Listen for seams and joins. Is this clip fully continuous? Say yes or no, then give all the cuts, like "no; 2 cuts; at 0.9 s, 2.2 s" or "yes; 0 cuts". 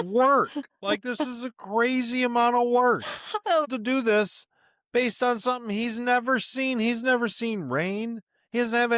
no; 1 cut; at 3.7 s